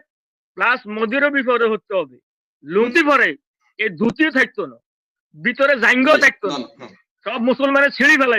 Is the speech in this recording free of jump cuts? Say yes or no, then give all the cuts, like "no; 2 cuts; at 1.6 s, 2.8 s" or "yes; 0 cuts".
no; 1 cut; at 2.9 s